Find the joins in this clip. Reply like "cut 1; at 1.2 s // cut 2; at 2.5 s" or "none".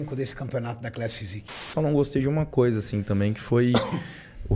cut 1; at 1.7 s